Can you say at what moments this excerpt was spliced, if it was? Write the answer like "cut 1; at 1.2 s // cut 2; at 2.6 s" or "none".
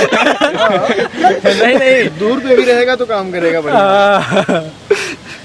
none

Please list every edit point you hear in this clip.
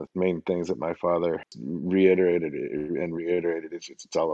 cut 1; at 1.6 s

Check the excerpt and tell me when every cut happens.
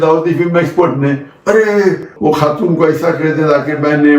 cut 1; at 2.1 s

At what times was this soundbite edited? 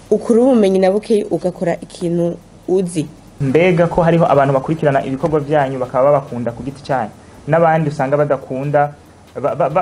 cut 1; at 3.2 s

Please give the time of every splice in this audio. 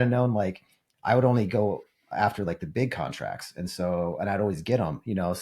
cut 1; at 0.9 s

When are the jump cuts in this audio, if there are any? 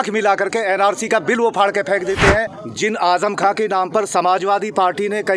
cut 1; at 2.6 s

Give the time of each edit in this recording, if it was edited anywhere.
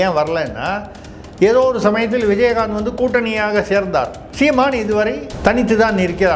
cut 1; at 4.2 s // cut 2; at 5.3 s

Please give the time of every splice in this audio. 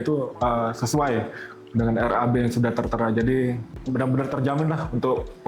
cut 1; at 3.7 s

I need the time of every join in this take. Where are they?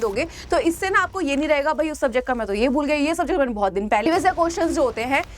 cut 1; at 4.1 s

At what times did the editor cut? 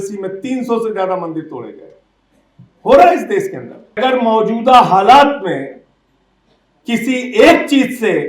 cut 1; at 4.0 s

